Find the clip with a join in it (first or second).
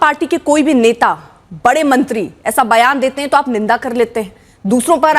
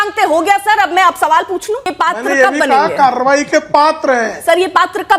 second